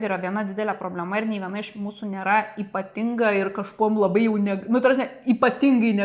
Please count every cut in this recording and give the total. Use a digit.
0